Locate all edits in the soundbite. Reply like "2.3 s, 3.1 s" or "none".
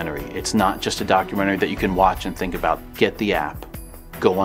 2.8 s